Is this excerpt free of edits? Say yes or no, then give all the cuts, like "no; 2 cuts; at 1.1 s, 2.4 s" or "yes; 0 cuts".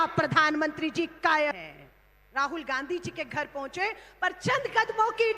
no; 1 cut; at 1.5 s